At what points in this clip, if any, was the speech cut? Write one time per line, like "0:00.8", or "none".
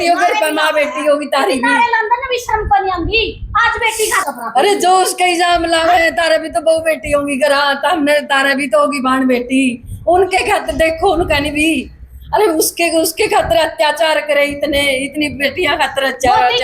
0:04.2